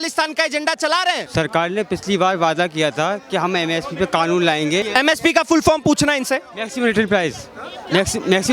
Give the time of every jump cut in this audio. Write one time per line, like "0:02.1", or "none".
0:01.2
0:04.8